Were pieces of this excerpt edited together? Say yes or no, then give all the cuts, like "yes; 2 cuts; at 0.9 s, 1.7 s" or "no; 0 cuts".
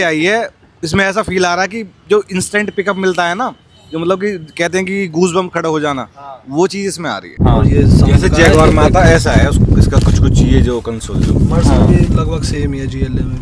yes; 1 cut; at 7.4 s